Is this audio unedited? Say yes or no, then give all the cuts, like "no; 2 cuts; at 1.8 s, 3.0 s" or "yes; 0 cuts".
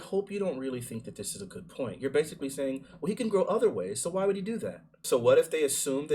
no; 1 cut; at 5.0 s